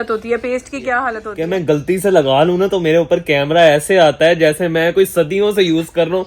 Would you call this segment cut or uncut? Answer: cut